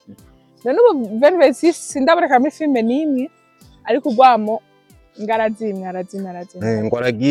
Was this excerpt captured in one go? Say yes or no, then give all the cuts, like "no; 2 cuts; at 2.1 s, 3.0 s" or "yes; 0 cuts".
yes; 0 cuts